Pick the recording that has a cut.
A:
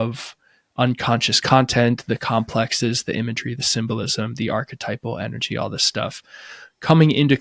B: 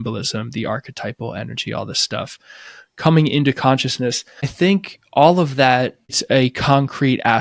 B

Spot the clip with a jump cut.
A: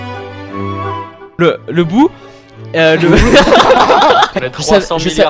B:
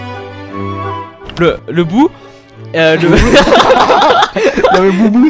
A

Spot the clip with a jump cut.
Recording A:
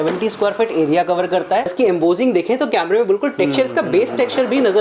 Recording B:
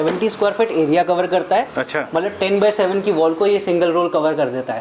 A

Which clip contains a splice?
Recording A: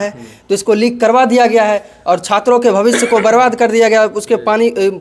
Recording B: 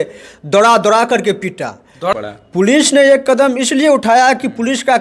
B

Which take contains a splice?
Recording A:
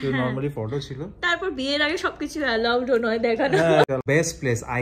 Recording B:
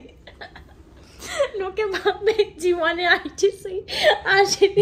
A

